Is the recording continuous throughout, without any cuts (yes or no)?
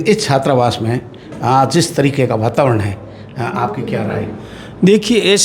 yes